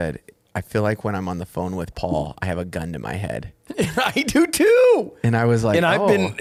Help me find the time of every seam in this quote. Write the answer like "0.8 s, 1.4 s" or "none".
none